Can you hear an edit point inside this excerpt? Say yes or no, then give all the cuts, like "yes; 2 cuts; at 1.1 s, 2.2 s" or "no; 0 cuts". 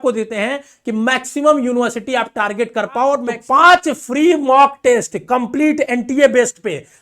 yes; 1 cut; at 3.3 s